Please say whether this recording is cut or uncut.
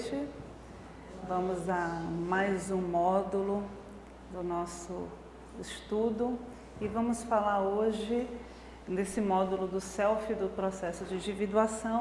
uncut